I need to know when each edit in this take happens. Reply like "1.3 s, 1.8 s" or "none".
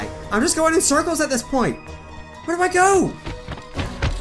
none